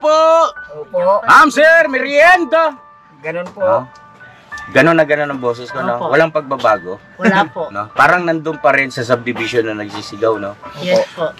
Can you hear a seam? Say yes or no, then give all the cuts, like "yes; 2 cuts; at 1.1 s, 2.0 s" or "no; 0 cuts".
no; 0 cuts